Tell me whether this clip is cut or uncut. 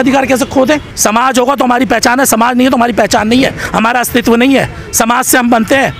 cut